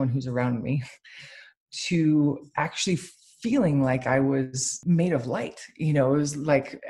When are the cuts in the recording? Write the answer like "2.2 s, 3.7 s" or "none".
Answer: 4.8 s